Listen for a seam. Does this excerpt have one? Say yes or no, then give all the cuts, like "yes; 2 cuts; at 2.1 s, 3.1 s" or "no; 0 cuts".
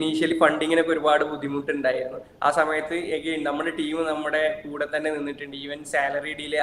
no; 0 cuts